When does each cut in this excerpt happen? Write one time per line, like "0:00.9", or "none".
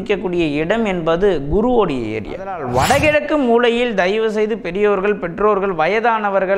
0:02.6